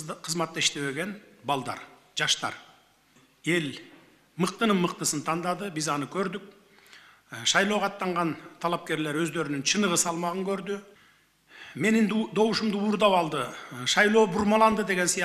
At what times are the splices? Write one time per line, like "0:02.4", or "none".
0:03.2
0:10.9